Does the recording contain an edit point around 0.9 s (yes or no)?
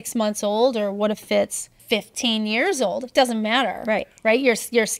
no